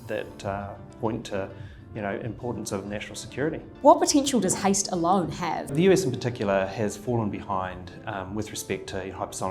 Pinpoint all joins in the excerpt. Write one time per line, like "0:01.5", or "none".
0:03.7
0:05.7